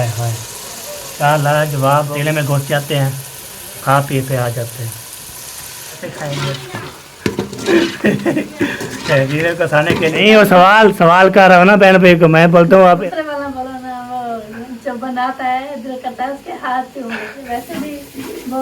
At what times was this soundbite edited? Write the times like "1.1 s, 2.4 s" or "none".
2.1 s, 6.1 s, 10.2 s, 13.0 s, 17.4 s